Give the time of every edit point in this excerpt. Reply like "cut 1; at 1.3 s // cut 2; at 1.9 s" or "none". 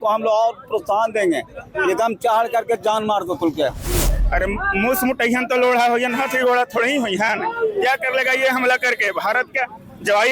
cut 1; at 4.2 s